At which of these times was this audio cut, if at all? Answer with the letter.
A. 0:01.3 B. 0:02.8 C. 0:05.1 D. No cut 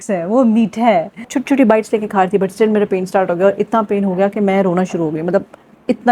A